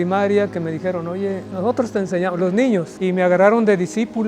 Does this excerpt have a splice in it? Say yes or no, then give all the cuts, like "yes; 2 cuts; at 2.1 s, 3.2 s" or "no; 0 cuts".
yes; 2 cuts; at 1.5 s, 2.9 s